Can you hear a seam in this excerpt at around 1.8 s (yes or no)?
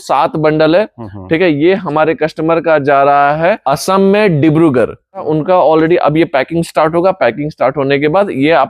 no